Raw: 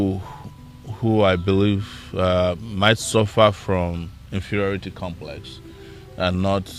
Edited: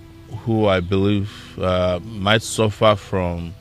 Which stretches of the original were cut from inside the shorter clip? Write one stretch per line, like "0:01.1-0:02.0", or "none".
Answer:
none